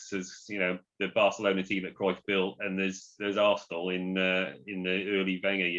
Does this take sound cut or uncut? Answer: uncut